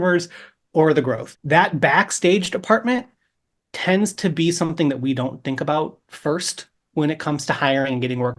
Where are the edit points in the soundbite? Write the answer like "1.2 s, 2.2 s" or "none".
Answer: 1.3 s